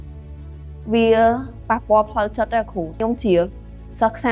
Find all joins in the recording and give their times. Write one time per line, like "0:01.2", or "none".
0:03.0